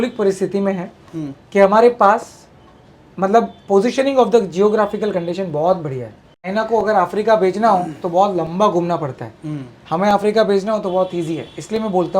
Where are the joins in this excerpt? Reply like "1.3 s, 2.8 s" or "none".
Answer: 6.5 s

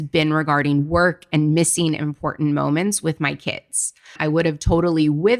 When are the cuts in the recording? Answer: 4.2 s

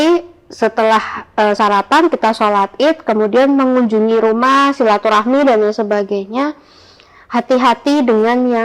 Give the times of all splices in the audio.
none

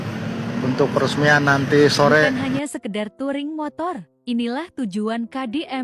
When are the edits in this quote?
3.0 s

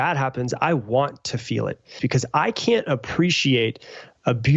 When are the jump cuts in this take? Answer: 2.0 s

